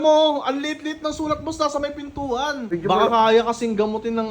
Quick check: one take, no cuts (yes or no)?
no